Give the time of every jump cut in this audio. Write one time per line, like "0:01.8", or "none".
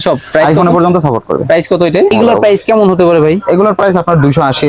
0:02.1